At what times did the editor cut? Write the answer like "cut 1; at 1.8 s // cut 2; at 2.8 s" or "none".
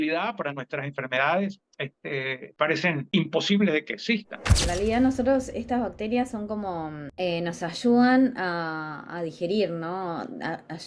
cut 1; at 2.4 s // cut 2; at 3.0 s // cut 3; at 4.5 s // cut 4; at 7.0 s